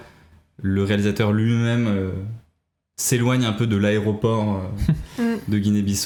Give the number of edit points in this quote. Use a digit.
0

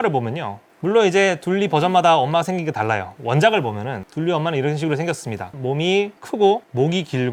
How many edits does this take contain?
0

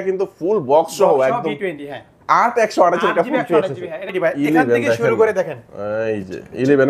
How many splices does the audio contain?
1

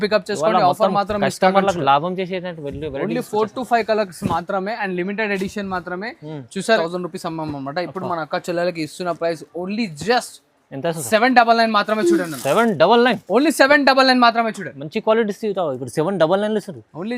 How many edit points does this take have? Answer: 1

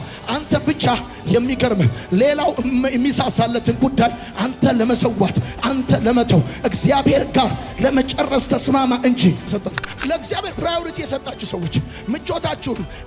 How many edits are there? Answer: 1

